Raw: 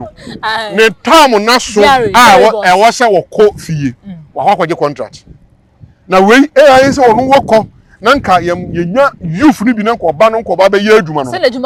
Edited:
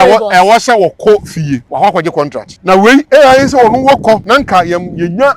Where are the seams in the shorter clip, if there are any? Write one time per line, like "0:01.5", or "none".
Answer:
0:01.7
0:02.5
0:04.2